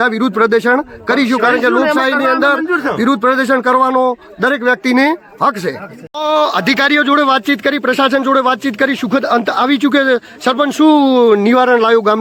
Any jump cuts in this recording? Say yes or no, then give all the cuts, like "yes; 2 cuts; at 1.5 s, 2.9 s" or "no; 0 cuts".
no; 0 cuts